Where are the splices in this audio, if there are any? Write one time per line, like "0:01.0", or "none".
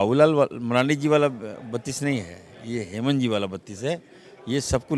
none